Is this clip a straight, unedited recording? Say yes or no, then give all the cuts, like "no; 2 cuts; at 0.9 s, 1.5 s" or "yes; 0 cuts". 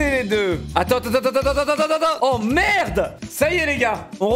no; 1 cut; at 2.2 s